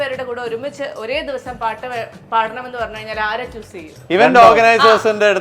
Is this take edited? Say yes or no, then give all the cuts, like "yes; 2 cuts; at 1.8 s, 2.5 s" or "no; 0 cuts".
yes; 1 cut; at 3.9 s